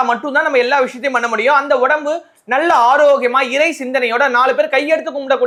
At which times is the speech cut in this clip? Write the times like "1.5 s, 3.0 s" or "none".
none